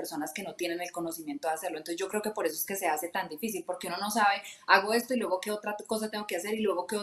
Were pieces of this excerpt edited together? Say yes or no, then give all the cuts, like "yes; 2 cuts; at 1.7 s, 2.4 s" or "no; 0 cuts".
no; 0 cuts